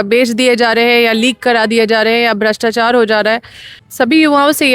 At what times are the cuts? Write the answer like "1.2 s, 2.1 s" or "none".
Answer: 3.8 s